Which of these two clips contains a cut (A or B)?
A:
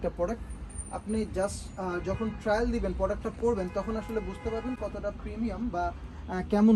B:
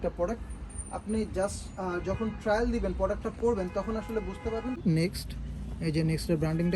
B